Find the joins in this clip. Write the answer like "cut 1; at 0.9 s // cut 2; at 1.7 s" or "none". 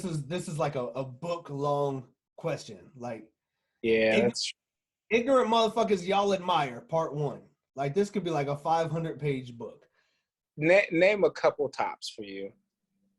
cut 1; at 10.3 s